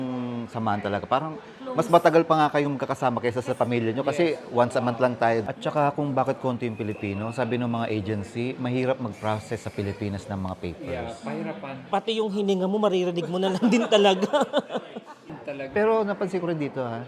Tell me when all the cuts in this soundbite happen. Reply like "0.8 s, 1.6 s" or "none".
5.4 s, 11.8 s, 15.4 s